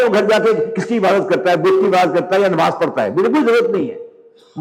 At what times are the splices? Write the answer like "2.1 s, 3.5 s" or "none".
none